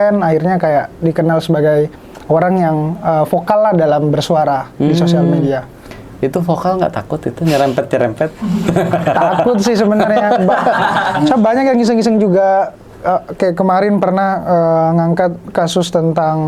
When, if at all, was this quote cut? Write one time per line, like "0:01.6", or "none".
none